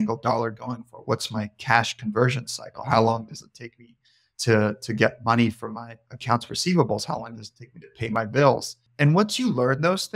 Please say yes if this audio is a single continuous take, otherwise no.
no